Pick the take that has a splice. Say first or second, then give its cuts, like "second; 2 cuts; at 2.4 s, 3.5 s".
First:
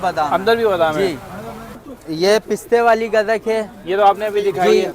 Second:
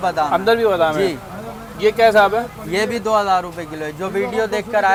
first; 1 cut; at 1.7 s